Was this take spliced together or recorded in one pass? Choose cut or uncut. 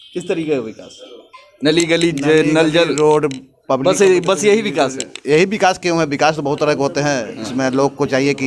uncut